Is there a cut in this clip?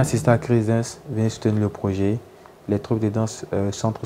no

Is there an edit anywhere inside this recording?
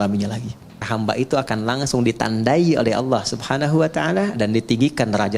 yes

